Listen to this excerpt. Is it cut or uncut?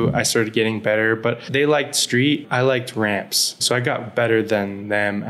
cut